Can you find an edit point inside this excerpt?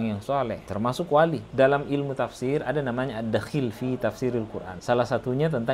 yes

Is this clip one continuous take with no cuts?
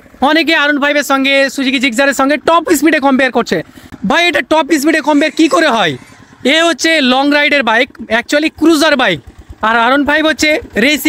yes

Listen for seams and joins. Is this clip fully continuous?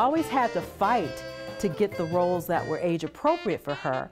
yes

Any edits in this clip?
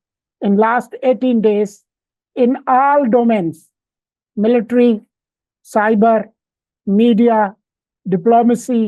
no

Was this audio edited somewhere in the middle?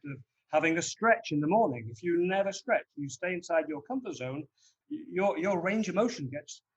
yes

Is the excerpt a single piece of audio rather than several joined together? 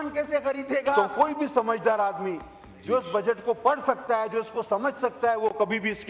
no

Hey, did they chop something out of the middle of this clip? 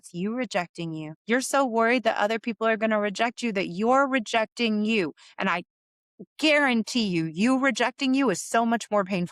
yes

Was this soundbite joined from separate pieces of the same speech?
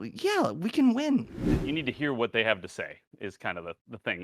yes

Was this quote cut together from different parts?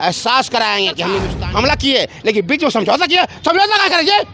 yes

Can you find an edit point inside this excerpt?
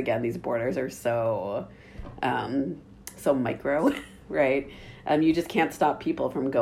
no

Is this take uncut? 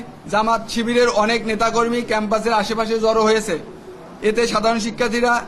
yes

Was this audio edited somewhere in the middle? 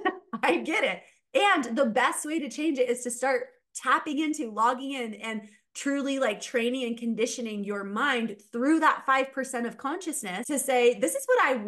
yes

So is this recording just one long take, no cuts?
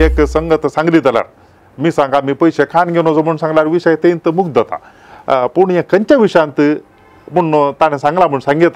yes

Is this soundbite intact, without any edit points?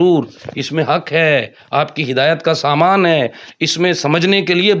yes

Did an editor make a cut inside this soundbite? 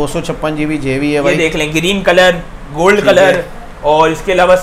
no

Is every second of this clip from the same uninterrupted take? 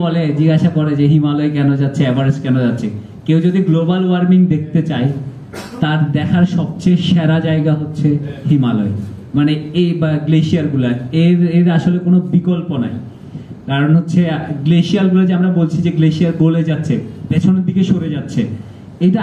yes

